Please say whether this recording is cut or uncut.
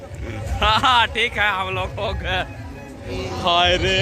cut